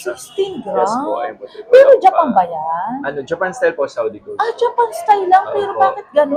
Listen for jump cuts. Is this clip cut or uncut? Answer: uncut